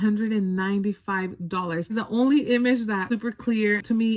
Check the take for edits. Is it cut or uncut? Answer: cut